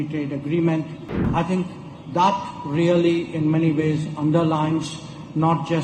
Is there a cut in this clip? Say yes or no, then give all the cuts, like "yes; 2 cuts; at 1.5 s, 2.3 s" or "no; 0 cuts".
yes; 1 cut; at 1.3 s